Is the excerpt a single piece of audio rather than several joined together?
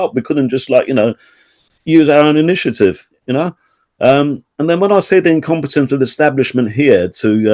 yes; 0 cuts

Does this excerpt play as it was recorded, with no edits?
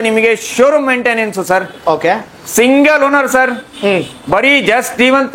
yes; 0 cuts

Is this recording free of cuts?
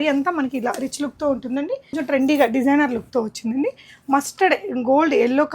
no; 1 cut; at 2.0 s

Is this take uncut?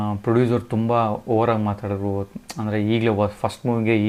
yes; 0 cuts

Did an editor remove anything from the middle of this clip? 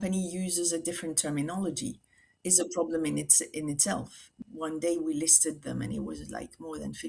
yes; 1 cut; at 4.3 s

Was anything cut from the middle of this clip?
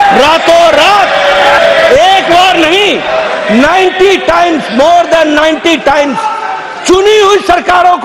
yes; 1 cut; at 1.6 s

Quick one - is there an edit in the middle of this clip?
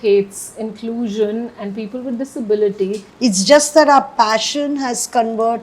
yes; 1 cut; at 3.0 s

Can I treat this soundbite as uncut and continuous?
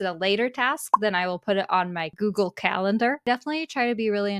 no; 2 cuts; at 2.0 s, 3.3 s

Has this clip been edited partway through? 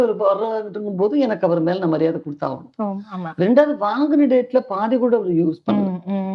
no; 0 cuts

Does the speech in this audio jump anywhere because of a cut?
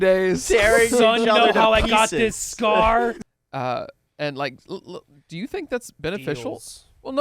yes; 1 cut; at 3.2 s

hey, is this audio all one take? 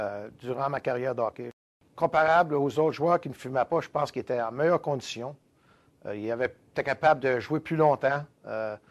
yes; 0 cuts

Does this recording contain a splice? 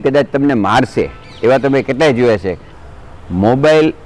yes; 1 cut; at 2.7 s

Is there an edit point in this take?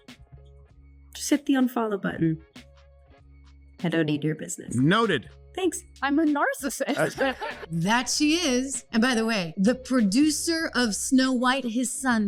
no; 0 cuts

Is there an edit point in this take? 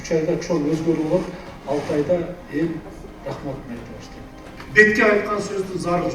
yes; 1 cut; at 4.6 s

